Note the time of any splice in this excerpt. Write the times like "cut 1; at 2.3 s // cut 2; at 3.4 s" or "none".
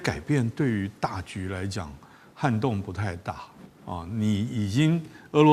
none